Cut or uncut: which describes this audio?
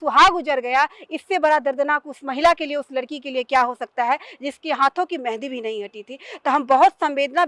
uncut